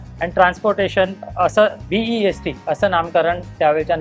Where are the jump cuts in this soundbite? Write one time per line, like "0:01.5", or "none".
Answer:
0:01.2